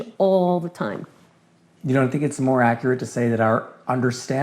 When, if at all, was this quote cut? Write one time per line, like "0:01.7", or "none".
0:01.6

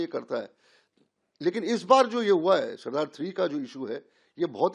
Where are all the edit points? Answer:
none

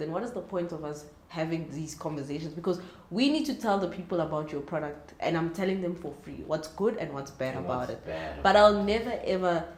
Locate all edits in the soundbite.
none

